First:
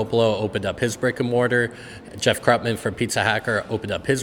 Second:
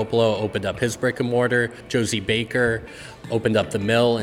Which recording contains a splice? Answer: second; 1 cut; at 1.8 s

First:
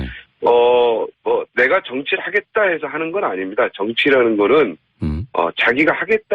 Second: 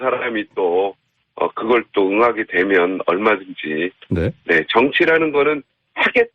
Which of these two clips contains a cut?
first; 1 cut; at 5.2 s

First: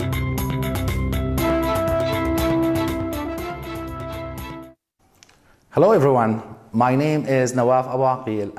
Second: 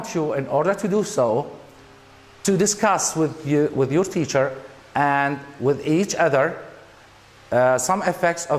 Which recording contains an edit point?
first; 1 cut; at 1.0 s

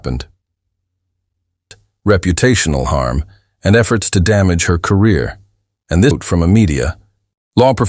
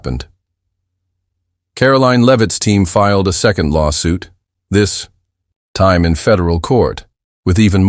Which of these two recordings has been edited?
first; 2 cuts; at 1.6 s, 6.2 s

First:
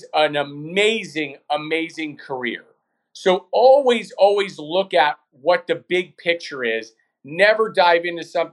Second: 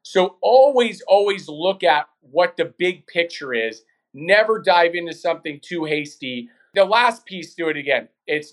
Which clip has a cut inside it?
second; 1 cut; at 6.6 s

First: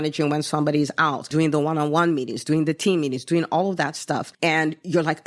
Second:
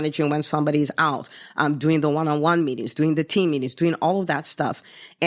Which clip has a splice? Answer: first; 2 cuts; at 1.3 s, 4.3 s

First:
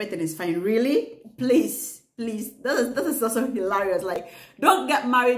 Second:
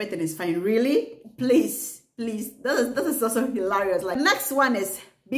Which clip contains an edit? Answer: second; 1 cut; at 4.2 s

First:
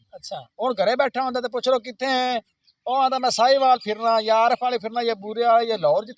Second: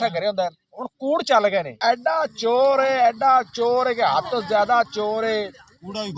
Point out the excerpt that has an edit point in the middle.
second; 1 cut; at 1.7 s

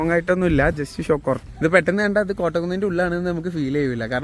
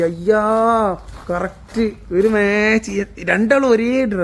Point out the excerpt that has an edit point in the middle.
first; 1 cut; at 1.4 s

